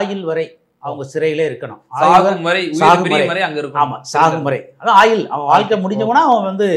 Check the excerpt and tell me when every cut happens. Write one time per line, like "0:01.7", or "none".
none